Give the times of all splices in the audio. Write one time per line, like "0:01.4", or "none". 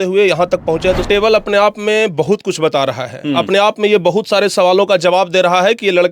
0:01.0